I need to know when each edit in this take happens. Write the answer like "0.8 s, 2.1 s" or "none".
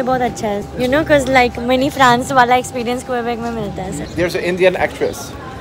4.0 s

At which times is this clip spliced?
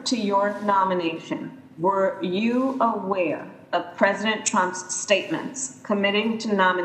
none

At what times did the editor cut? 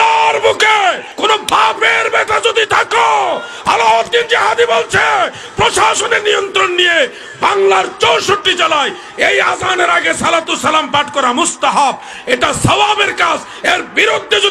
1.1 s

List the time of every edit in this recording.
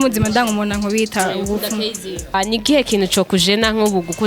2.3 s

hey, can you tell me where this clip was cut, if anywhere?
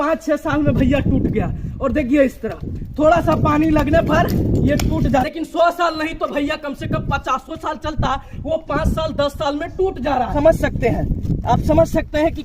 5.3 s, 10.3 s

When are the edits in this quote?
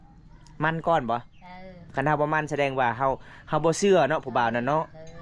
1.8 s

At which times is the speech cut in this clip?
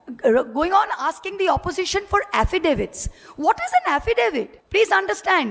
4.5 s

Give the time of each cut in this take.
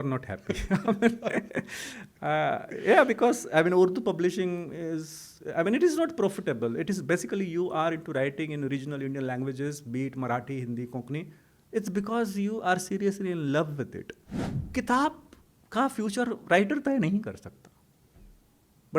14.6 s

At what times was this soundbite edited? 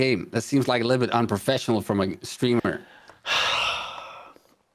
none

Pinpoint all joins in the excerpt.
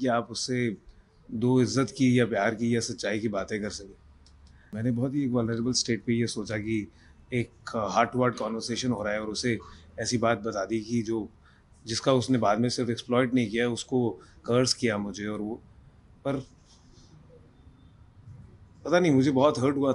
4.7 s

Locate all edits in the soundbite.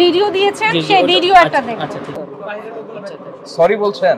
2.2 s

